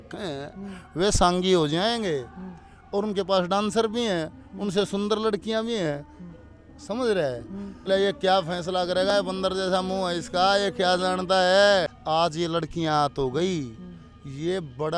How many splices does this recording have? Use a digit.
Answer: 2